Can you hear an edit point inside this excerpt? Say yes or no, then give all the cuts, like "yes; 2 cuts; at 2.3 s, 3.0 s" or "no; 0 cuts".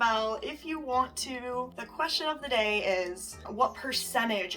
yes; 2 cuts; at 1.8 s, 3.4 s